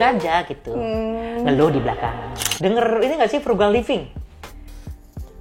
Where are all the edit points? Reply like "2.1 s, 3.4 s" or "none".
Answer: 2.4 s